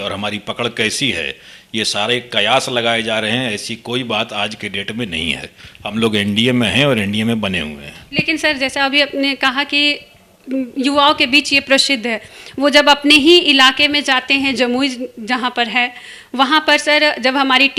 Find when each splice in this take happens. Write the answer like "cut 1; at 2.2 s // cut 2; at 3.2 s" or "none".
none

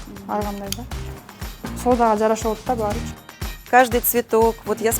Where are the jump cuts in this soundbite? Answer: cut 1; at 3.7 s

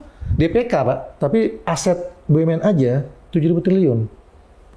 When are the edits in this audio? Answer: cut 1; at 1.1 s

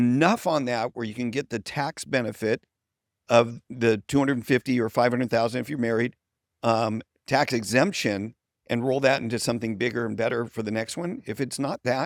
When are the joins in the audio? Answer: none

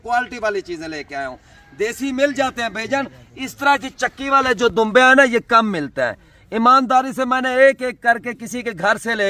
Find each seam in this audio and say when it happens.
none

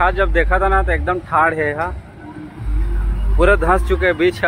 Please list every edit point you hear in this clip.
none

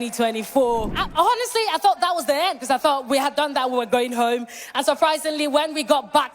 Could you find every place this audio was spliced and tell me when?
cut 1; at 1.0 s

